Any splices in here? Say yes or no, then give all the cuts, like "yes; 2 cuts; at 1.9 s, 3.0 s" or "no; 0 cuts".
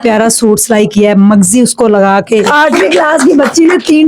yes; 1 cut; at 2.5 s